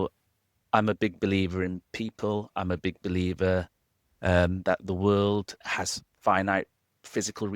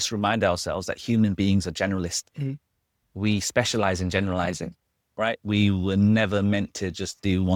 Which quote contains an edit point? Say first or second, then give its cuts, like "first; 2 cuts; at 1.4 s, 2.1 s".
first; 1 cut; at 5.6 s